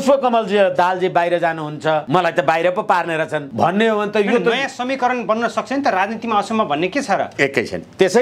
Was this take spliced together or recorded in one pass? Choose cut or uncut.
cut